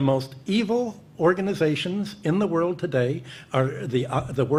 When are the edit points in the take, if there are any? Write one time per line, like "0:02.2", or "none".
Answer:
none